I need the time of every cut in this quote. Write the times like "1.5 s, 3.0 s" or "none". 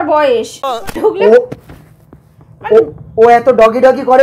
0.9 s